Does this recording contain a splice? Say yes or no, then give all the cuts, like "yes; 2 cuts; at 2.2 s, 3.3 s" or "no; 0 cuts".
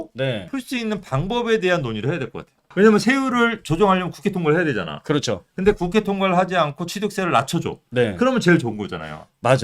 yes; 1 cut; at 2.6 s